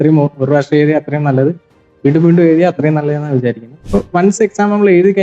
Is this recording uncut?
no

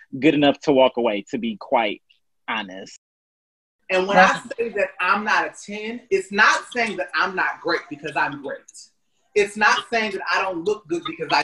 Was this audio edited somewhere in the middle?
yes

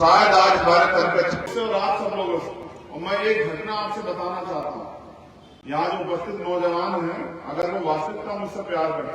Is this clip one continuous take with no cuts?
no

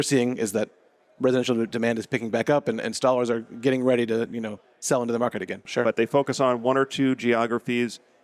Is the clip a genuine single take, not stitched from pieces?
no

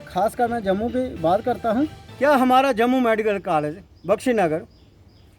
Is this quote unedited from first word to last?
no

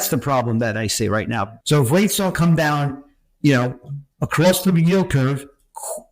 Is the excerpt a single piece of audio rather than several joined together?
no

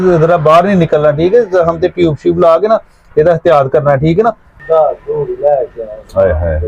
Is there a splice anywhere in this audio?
yes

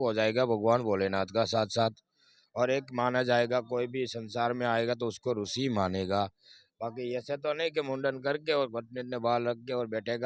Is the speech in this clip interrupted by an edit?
no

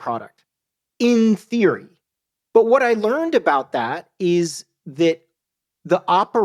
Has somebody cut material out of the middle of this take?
no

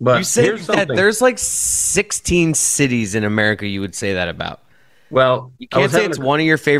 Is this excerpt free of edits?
yes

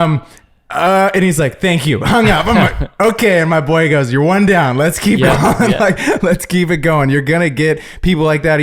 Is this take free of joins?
yes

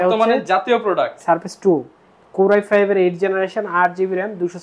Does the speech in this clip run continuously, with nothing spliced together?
yes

